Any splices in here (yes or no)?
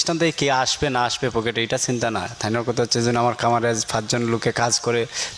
no